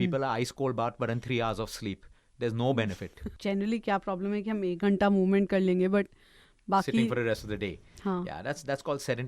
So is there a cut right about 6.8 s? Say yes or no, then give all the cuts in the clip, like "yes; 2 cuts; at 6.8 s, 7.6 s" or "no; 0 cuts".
no; 1 cut; at 3.2 s